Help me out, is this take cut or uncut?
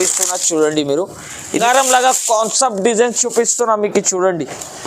cut